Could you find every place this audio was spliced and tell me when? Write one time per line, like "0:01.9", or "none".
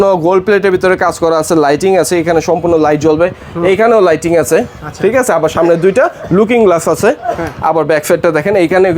none